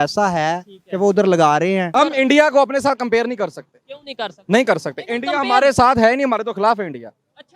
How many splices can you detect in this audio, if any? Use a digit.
1